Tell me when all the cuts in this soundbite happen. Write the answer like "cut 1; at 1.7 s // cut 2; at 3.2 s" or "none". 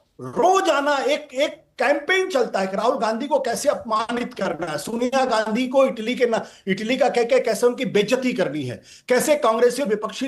none